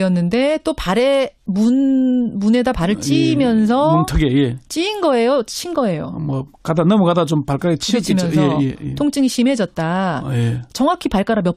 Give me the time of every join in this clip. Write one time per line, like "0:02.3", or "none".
none